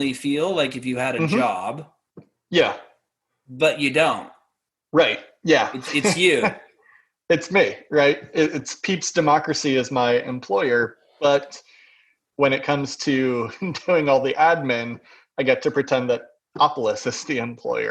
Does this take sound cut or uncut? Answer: uncut